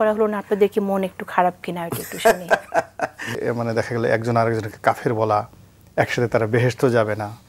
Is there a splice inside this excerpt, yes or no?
yes